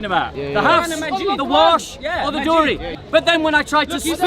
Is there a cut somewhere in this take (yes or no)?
yes